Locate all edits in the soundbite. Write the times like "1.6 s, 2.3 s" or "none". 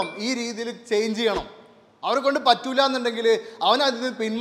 none